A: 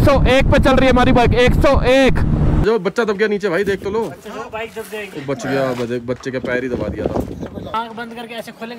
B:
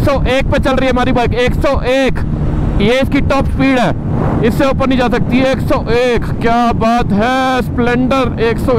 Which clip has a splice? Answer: A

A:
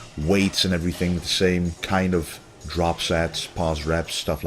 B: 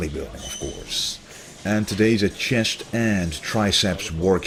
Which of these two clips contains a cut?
A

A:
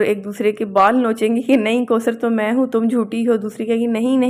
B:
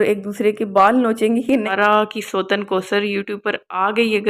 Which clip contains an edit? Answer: B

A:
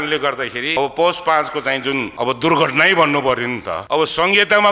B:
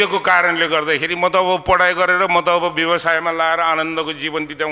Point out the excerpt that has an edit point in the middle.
A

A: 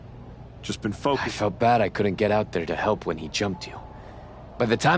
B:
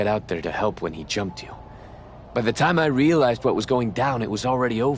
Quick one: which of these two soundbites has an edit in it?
A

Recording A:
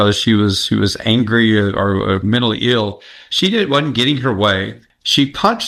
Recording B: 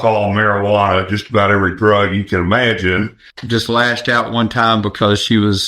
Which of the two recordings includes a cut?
B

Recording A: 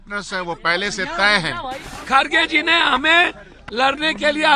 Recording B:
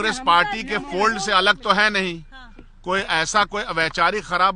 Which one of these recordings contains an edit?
A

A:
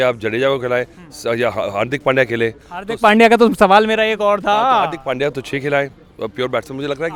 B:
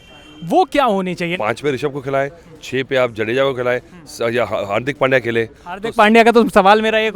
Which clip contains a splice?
B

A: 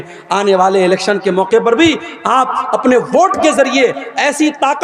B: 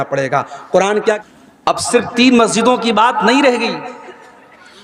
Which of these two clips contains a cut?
B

